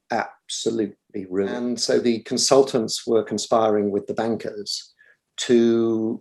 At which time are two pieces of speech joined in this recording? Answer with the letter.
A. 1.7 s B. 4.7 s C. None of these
A